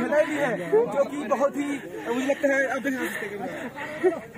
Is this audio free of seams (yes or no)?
yes